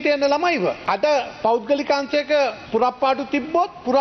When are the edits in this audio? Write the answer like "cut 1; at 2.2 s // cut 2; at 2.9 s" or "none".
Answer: cut 1; at 0.8 s // cut 2; at 2.6 s

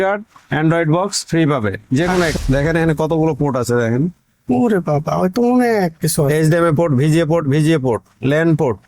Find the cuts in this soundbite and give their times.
cut 1; at 2.3 s

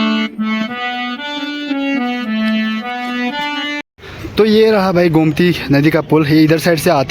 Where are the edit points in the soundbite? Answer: cut 1; at 3.8 s

